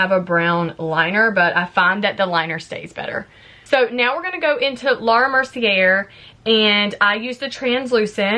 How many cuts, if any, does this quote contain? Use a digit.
0